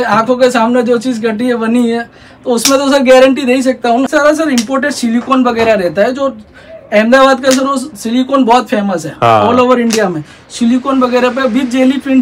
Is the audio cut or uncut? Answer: cut